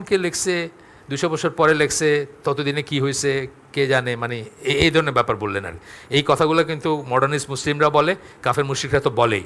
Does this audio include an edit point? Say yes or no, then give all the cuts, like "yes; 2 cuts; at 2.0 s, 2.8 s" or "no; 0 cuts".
no; 0 cuts